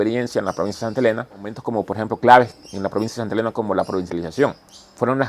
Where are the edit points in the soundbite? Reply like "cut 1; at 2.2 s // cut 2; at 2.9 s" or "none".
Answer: cut 1; at 1.6 s